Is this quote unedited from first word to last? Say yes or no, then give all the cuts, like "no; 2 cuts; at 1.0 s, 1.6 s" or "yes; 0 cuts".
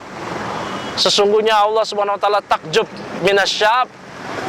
no; 1 cut; at 3.2 s